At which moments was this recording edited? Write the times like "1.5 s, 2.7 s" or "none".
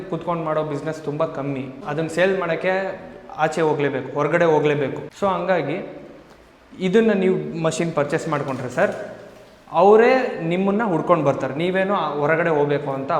1.8 s, 5.0 s